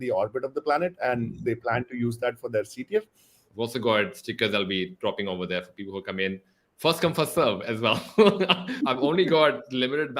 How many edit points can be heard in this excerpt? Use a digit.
2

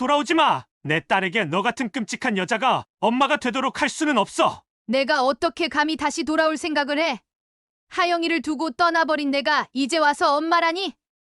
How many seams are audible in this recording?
1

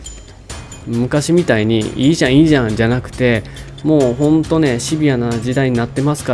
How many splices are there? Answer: 0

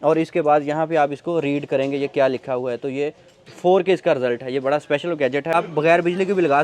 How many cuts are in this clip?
1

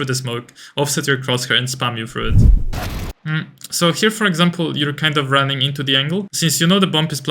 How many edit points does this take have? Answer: 2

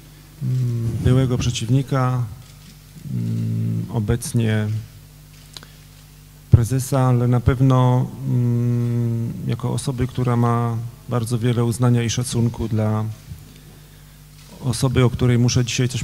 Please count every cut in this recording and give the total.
1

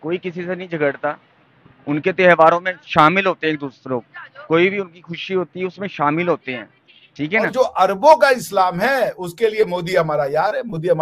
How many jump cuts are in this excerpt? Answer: 1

